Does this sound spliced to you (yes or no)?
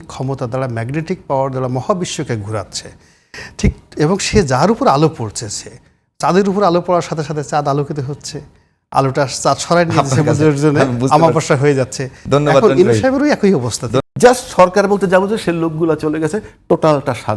yes